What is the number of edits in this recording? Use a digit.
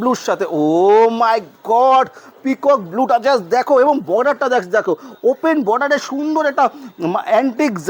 0